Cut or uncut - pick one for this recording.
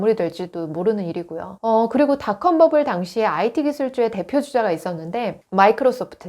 cut